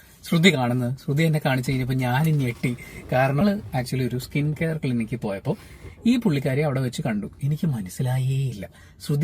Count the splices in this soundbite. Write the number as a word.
one